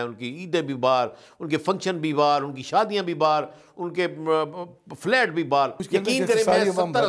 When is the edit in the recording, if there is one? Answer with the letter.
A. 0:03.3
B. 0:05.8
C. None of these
B